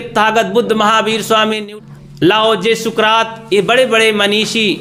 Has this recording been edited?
yes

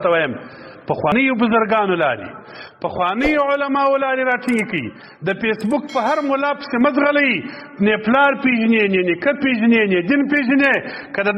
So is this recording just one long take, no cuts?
no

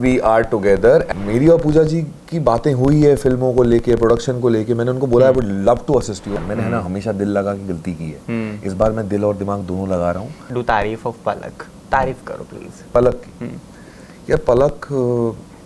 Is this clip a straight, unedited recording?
no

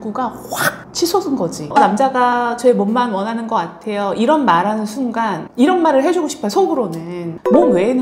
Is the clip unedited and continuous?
no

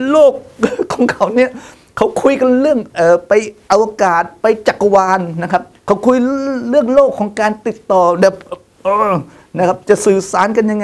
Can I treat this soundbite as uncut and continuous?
no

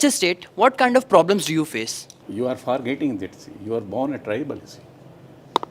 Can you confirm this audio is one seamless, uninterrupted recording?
yes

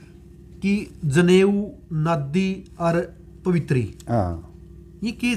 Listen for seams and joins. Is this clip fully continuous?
yes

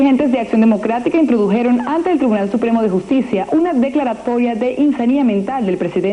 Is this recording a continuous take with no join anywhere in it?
yes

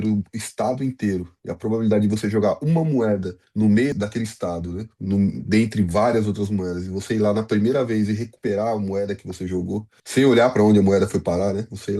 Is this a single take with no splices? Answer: no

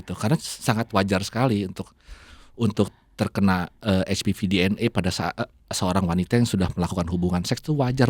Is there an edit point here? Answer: no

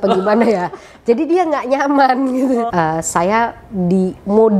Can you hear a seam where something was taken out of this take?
yes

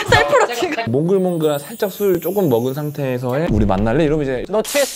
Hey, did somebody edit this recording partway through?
yes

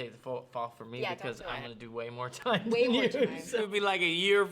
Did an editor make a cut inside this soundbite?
yes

